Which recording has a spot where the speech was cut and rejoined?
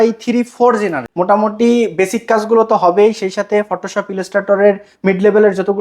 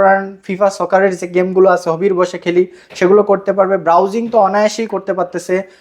first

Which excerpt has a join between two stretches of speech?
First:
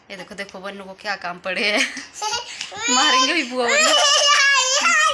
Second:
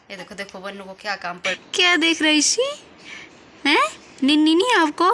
second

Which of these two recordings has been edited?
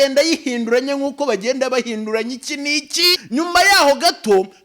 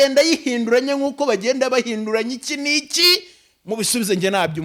first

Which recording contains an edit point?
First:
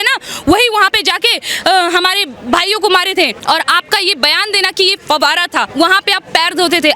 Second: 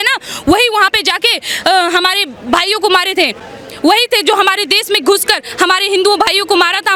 first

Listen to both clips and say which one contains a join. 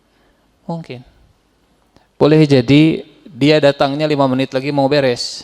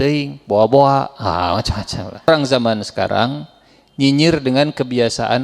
second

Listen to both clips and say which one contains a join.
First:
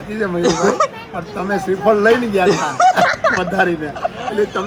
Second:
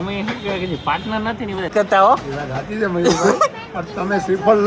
second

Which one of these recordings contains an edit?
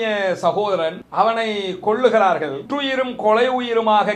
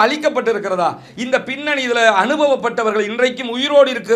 first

